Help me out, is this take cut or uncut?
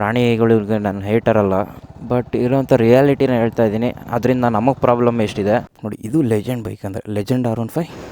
cut